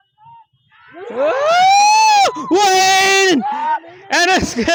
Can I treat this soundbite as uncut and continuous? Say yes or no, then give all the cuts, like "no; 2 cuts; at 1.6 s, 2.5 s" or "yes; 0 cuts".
yes; 0 cuts